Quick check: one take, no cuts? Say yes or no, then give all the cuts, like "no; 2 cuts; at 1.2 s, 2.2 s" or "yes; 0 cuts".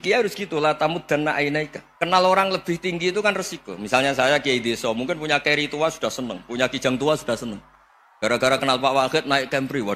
no; 1 cut; at 1.8 s